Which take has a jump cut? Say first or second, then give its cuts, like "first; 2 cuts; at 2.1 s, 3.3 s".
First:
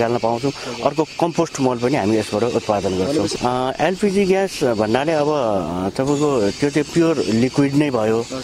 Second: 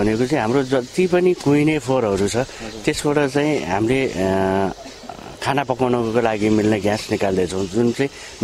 first; 1 cut; at 3.3 s